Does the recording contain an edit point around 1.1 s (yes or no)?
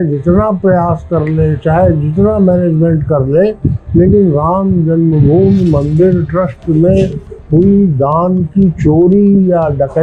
no